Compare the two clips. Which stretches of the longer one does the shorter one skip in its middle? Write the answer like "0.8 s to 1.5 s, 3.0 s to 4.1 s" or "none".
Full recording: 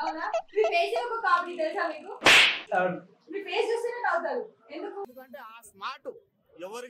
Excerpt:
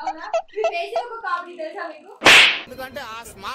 2.7 s to 5.0 s